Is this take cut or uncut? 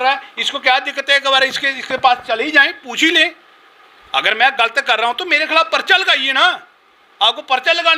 uncut